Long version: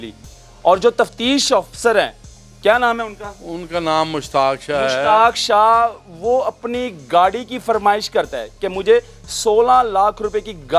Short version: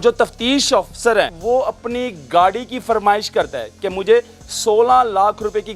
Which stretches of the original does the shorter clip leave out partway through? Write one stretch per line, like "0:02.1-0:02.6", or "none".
0:02.1-0:06.1